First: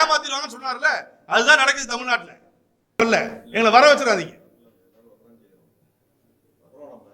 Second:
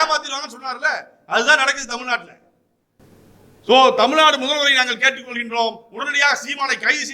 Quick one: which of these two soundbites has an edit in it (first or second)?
first